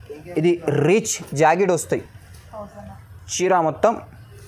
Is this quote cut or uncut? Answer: uncut